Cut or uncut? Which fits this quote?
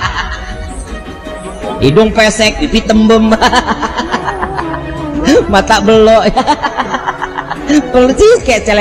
uncut